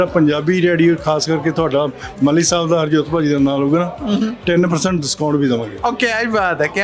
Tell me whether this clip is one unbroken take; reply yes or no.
yes